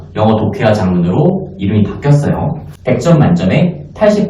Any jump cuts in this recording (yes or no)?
yes